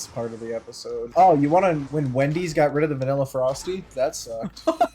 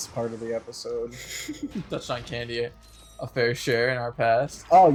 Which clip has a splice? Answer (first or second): first